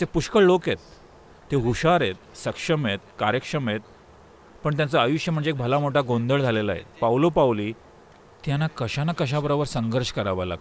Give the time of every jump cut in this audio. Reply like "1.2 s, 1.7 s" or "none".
none

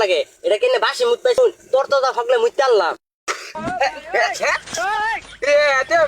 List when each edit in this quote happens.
1.4 s

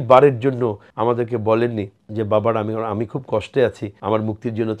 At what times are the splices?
0.9 s, 2.0 s, 3.9 s

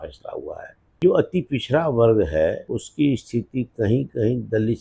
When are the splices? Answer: 1.0 s, 2.6 s

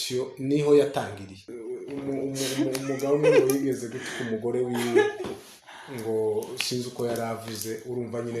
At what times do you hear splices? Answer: 1.5 s

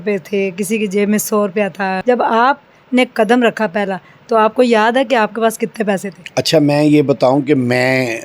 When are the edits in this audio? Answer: 2.0 s, 6.2 s

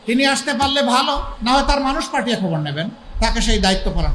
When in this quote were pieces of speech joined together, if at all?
1.3 s, 3.0 s

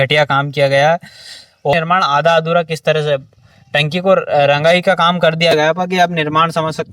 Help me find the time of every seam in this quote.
1.7 s

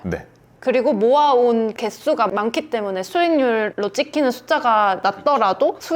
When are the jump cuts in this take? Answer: 1.7 s, 3.7 s, 5.0 s

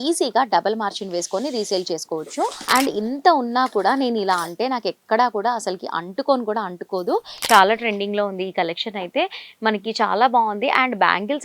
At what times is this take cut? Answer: 2.6 s, 7.3 s

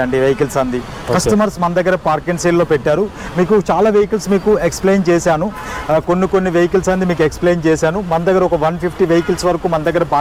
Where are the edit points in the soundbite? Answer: none

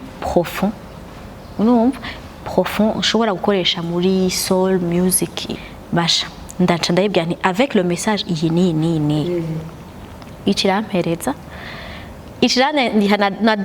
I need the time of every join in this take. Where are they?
5.5 s

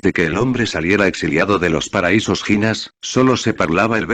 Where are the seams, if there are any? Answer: none

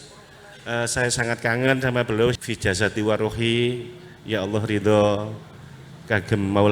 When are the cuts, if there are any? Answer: 2.4 s

